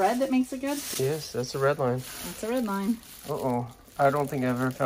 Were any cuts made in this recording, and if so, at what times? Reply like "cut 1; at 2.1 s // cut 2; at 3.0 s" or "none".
none